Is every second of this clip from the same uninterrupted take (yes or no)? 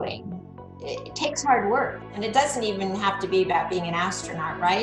no